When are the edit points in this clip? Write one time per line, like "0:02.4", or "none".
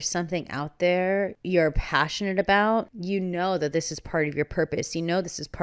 0:01.4
0:03.0